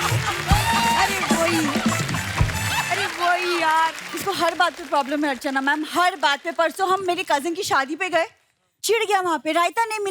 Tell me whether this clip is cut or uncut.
cut